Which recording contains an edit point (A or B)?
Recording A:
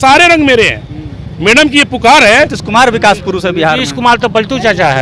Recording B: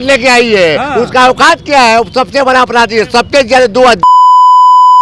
A